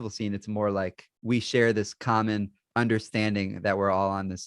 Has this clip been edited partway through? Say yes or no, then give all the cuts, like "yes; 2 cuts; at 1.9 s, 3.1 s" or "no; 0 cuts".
yes; 2 cuts; at 1.1 s, 2.6 s